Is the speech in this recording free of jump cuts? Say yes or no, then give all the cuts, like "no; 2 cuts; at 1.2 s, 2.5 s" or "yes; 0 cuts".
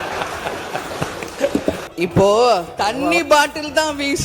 no; 1 cut; at 1.8 s